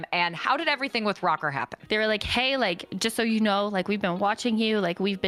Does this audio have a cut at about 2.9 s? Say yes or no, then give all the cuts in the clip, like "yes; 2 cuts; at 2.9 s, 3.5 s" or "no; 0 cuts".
yes; 2 cuts; at 1.8 s, 2.9 s